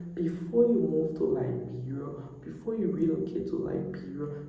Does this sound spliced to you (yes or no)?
no